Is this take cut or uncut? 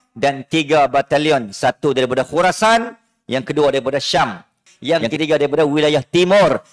cut